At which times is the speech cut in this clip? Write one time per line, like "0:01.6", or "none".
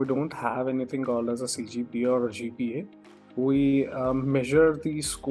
none